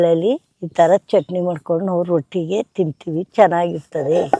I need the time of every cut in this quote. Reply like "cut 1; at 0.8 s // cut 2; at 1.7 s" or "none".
none